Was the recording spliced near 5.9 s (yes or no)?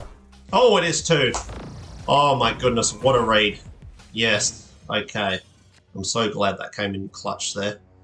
no